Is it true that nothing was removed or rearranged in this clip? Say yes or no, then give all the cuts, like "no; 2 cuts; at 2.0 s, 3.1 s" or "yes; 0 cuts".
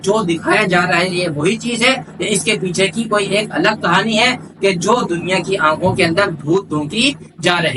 yes; 0 cuts